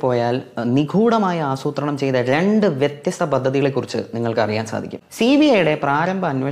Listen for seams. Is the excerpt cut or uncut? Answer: cut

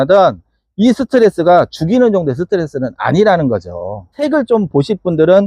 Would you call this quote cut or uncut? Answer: cut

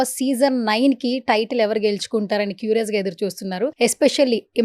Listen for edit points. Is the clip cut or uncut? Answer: cut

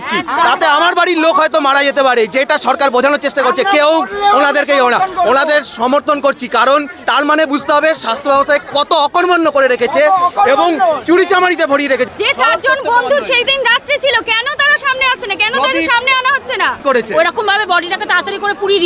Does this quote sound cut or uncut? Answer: cut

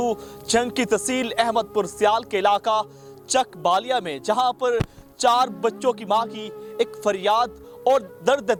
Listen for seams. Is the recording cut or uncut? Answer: uncut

